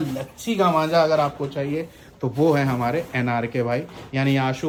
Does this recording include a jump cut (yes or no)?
no